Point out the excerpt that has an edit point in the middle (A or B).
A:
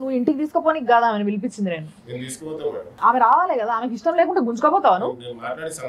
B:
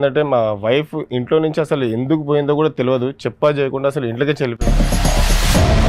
A